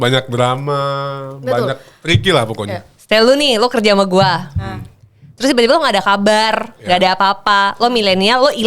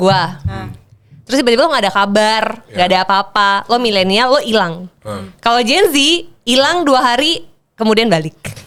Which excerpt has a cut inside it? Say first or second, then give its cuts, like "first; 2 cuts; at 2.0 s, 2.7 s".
first; 1 cut; at 2.9 s